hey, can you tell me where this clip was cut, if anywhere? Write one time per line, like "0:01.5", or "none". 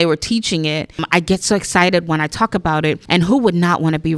0:01.0
0:03.0